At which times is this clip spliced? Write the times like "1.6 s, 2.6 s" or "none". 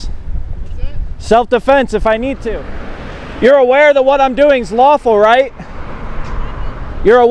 2.5 s